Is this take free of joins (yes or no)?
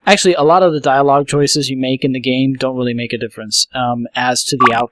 no